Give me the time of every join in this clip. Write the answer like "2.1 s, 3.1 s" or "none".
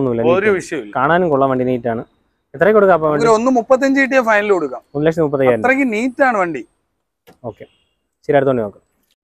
none